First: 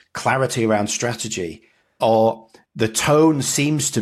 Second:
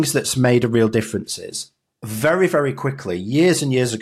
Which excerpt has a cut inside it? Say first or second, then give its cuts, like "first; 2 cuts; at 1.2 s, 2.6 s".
second; 1 cut; at 2.1 s